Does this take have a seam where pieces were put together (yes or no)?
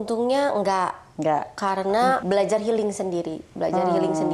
yes